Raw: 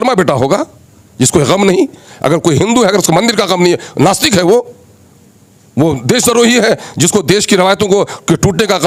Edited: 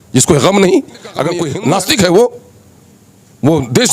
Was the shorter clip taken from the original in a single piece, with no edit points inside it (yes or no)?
no